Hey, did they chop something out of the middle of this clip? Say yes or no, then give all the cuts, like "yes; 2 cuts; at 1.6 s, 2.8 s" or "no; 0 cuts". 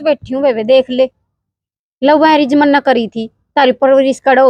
no; 0 cuts